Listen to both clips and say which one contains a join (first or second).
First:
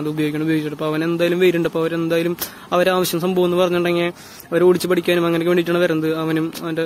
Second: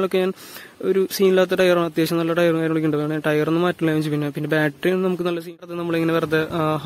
second